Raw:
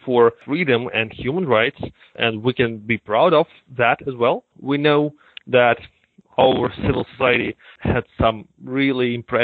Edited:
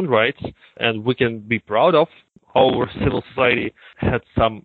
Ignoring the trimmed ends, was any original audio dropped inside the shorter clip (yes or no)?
yes